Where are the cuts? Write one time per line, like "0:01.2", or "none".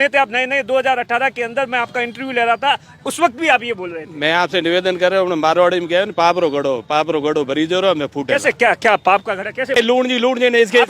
0:09.8